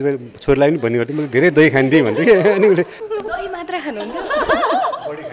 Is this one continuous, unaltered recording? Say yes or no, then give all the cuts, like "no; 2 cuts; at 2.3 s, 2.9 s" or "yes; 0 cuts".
no; 1 cut; at 3.0 s